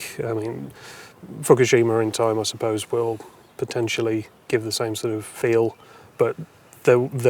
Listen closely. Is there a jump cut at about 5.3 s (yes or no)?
yes